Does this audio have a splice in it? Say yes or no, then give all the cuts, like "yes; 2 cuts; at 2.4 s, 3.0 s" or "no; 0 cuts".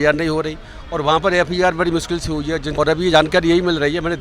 yes; 1 cut; at 2.7 s